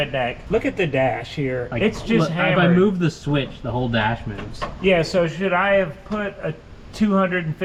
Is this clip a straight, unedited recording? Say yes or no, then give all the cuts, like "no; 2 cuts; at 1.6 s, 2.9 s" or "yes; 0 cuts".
yes; 0 cuts